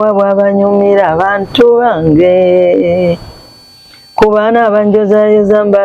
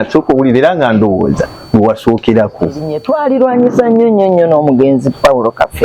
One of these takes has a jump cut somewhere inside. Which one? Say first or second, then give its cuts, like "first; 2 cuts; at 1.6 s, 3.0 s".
second; 1 cut; at 2.9 s